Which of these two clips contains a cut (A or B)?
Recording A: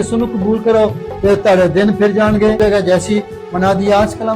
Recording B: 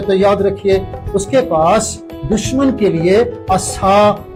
A